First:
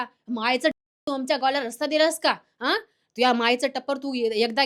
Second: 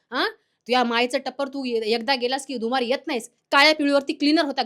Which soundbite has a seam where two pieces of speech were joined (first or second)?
second